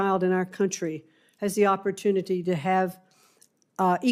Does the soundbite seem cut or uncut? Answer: uncut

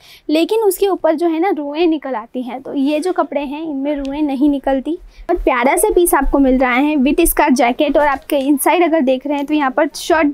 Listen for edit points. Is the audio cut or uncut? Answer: cut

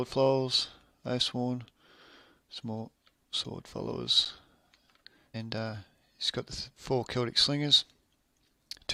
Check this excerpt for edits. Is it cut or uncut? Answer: uncut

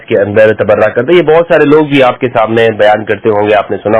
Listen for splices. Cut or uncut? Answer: uncut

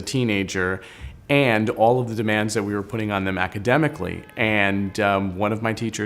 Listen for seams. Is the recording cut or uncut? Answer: cut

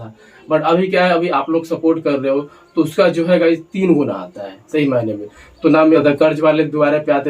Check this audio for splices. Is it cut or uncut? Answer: cut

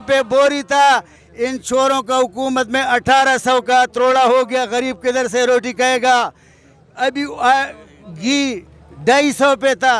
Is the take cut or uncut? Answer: uncut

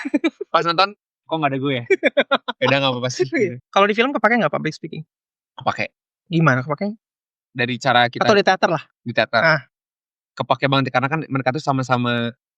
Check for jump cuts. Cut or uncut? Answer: uncut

